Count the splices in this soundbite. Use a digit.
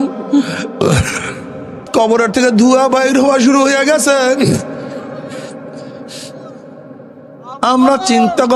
1